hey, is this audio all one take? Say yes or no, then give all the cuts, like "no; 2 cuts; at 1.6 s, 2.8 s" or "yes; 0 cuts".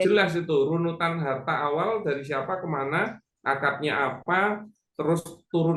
yes; 0 cuts